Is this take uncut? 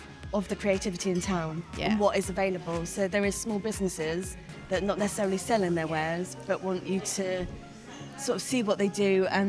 yes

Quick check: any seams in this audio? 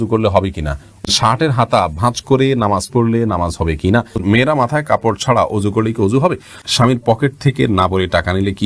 yes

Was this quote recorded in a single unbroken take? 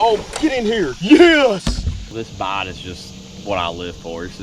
no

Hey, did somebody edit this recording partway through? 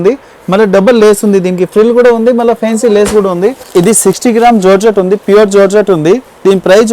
yes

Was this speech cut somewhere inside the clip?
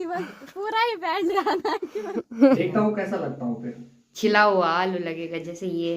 yes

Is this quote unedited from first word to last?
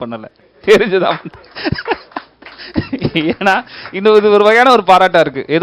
yes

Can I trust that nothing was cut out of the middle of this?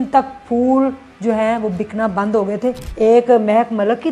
no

